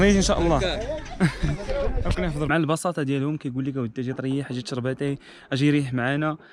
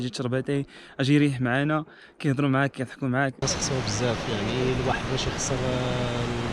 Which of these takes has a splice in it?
second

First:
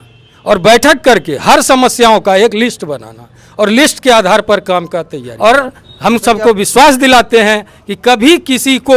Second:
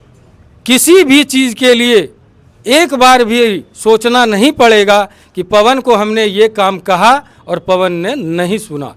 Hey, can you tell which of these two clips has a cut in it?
first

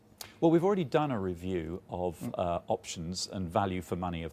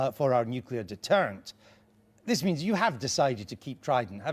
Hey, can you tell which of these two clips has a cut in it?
second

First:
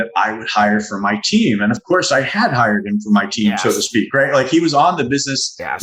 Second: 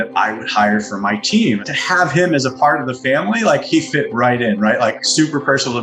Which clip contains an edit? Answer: second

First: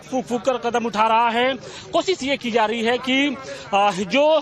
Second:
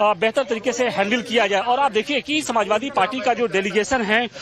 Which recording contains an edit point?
second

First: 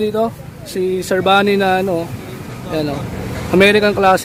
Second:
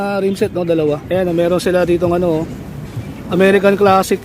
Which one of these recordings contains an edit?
second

